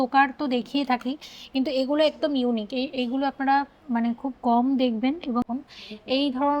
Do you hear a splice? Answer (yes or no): yes